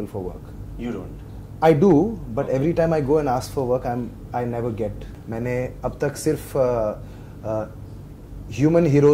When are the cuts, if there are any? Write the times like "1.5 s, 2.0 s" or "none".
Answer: 5.1 s